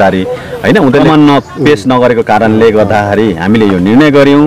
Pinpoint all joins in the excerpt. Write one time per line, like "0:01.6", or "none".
0:01.0